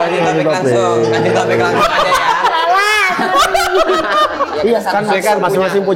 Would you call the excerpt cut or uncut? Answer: cut